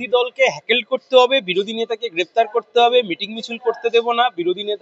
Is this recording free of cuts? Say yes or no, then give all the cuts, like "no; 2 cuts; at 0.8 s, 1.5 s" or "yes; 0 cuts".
yes; 0 cuts